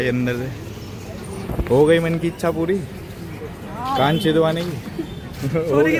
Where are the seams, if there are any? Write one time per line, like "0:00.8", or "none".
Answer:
none